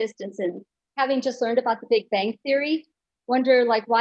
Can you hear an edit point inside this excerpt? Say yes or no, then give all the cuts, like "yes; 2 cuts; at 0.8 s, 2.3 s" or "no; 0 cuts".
no; 0 cuts